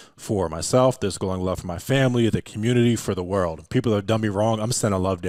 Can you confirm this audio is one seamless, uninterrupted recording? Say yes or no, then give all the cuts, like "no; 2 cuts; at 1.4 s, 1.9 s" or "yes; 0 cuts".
yes; 0 cuts